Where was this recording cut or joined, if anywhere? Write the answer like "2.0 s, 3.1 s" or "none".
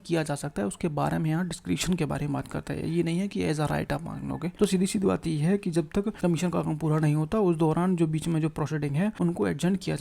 4.5 s, 6.1 s, 9.1 s